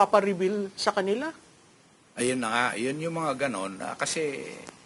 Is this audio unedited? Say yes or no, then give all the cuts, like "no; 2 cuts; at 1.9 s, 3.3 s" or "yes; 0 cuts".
yes; 0 cuts